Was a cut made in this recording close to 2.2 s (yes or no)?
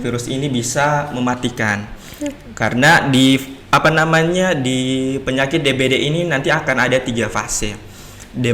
no